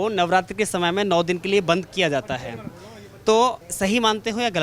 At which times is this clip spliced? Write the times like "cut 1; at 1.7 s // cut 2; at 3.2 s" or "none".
cut 1; at 3.6 s